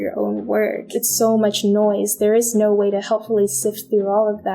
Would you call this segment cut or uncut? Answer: cut